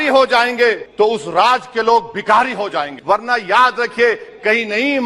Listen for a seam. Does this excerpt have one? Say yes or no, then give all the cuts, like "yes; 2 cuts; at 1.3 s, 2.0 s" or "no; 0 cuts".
yes; 2 cuts; at 0.8 s, 2.9 s